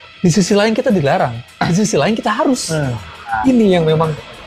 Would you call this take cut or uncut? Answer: cut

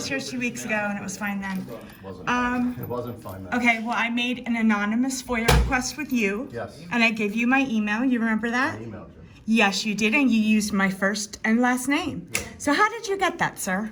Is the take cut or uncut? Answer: uncut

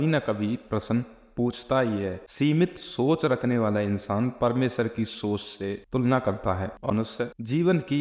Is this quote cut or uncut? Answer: cut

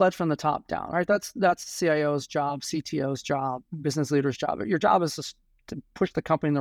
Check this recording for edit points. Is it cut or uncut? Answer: cut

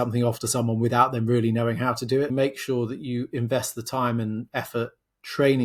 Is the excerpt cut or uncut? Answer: cut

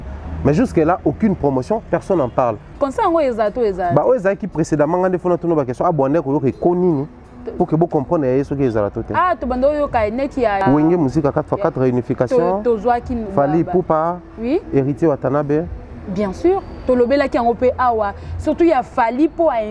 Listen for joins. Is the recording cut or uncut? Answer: cut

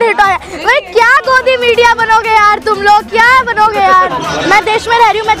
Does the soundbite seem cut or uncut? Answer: cut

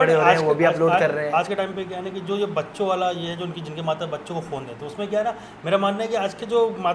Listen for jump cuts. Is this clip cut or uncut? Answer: uncut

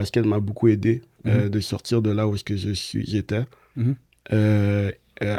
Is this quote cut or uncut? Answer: uncut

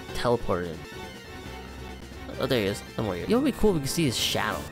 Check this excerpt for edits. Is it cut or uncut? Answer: uncut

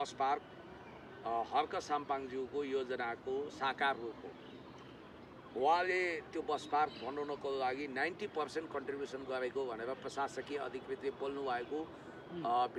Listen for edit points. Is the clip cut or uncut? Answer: uncut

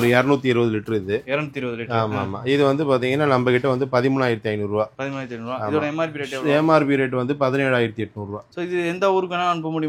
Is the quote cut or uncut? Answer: uncut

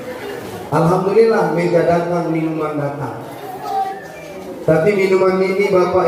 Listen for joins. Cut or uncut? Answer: uncut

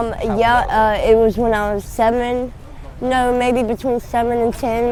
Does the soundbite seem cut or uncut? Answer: uncut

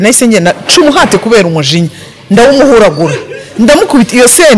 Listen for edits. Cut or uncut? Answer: uncut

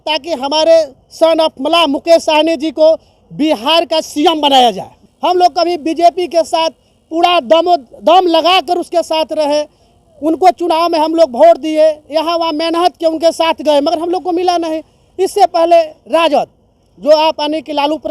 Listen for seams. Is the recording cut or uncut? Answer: cut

